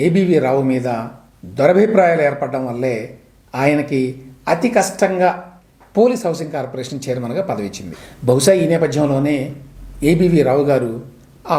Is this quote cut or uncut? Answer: uncut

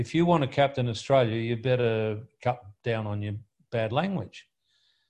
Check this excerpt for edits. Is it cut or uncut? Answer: uncut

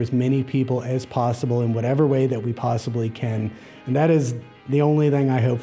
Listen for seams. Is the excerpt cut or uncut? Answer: uncut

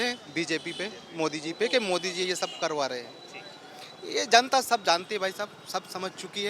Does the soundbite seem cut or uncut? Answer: uncut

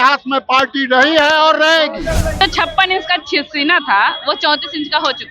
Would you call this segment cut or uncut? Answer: cut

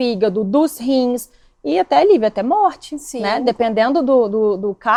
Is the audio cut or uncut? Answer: uncut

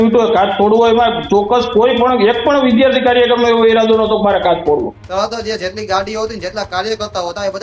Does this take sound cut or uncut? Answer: cut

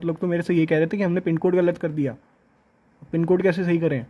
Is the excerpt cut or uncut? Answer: uncut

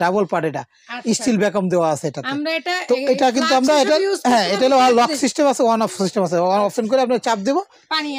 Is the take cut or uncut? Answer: uncut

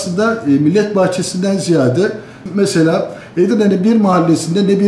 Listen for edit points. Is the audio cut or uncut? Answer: uncut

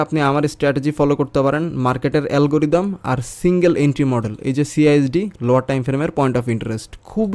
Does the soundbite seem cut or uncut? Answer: uncut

